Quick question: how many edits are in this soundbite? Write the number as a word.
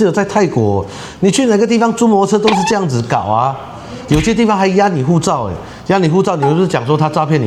zero